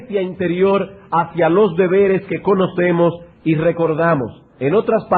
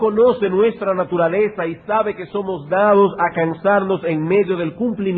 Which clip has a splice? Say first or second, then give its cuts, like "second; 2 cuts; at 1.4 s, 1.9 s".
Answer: second; 1 cut; at 1.9 s